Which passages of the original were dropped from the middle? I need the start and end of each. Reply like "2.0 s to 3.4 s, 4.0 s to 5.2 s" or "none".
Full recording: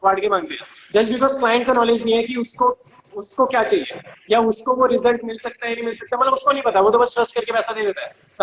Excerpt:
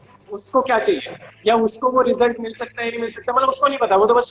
none